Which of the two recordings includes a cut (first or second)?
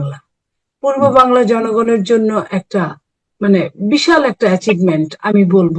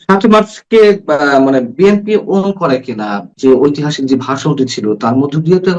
second